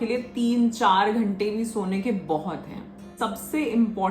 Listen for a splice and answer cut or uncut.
cut